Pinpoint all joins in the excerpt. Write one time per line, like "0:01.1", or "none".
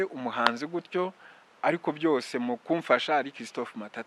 none